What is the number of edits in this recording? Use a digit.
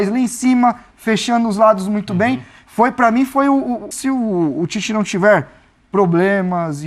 1